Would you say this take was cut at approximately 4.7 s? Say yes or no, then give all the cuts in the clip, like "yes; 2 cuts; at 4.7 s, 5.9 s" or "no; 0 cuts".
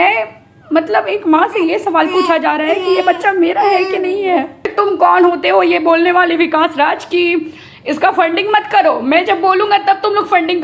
yes; 1 cut; at 4.7 s